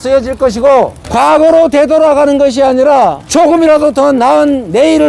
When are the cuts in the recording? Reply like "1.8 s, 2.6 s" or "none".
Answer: 3.2 s